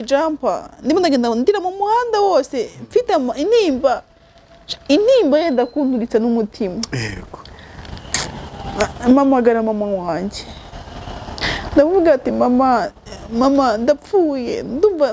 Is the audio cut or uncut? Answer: uncut